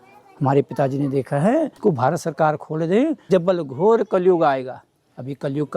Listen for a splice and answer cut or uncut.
cut